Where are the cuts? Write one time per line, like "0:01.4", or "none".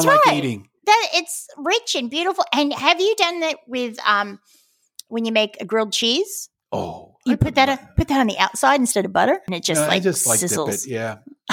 0:09.5